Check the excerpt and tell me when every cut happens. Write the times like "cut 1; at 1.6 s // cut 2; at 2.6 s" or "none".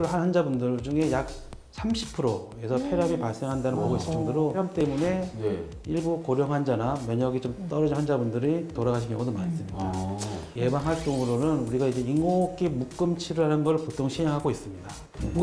cut 1; at 4.8 s // cut 2; at 10.4 s